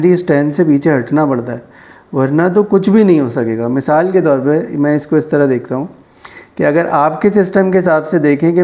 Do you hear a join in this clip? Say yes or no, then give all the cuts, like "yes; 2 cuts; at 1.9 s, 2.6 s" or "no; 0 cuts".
no; 0 cuts